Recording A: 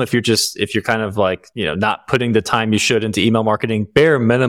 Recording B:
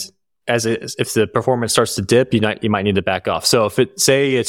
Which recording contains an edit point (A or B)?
A